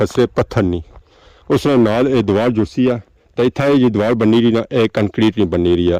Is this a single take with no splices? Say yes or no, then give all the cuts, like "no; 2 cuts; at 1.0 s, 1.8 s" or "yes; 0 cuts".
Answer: yes; 0 cuts